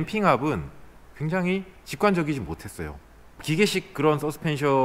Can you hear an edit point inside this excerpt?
yes; 1 cut; at 3.4 s

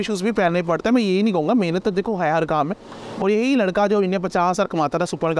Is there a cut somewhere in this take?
no; 0 cuts

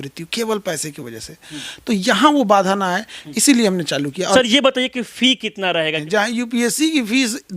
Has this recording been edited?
yes; 2 cuts; at 4.4 s, 6.0 s

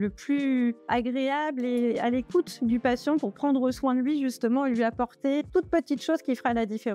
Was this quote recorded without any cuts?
yes; 0 cuts

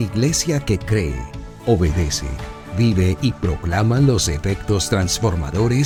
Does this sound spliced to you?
no; 0 cuts

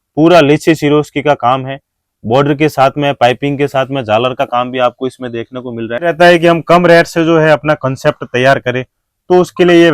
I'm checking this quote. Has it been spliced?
yes; 1 cut; at 6.1 s

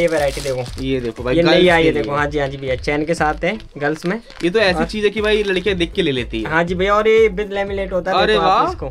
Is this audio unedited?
yes; 0 cuts

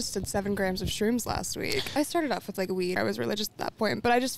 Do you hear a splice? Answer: yes; 2 cuts; at 1.9 s, 3.0 s

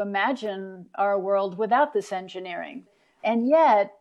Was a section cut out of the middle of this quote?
yes; 1 cut; at 3.1 s

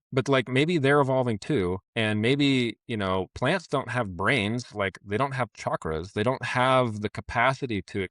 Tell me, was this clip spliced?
yes; 1 cut; at 1.9 s

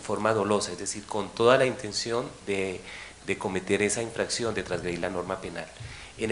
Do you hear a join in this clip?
no; 0 cuts

